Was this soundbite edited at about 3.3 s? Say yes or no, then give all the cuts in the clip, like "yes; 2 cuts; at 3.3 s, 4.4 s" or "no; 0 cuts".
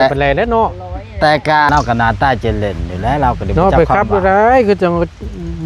no; 1 cut; at 1.7 s